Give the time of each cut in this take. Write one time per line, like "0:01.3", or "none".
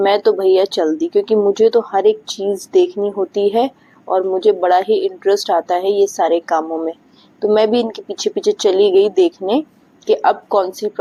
none